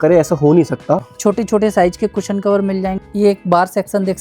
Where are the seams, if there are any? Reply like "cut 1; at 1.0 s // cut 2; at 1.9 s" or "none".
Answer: cut 1; at 1.1 s // cut 2; at 3.0 s